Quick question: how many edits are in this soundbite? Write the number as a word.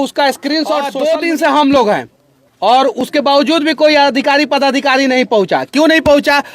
one